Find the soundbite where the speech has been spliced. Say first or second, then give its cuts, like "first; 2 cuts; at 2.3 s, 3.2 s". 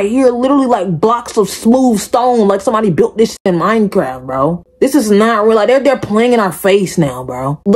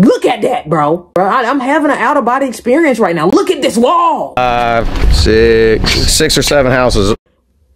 second; 2 cuts; at 1.1 s, 4.4 s